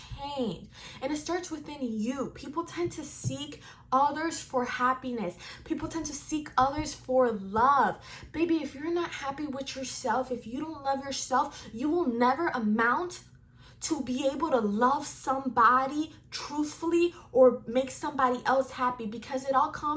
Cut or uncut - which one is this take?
uncut